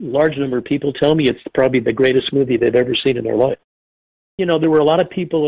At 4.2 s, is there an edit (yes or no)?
yes